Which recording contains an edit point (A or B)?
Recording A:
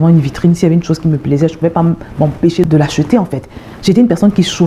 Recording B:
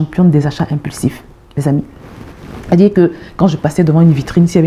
A